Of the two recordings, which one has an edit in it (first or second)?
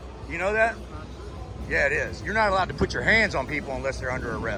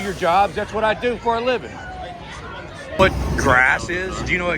second